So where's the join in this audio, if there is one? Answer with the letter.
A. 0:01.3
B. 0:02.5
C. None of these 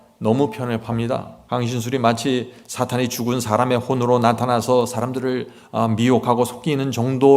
A